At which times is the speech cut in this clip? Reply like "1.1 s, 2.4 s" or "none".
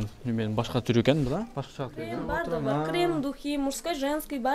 2.2 s